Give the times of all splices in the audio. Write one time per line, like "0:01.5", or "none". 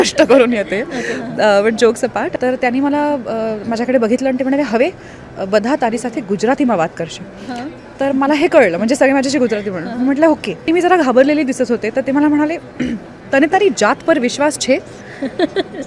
0:02.3
0:10.7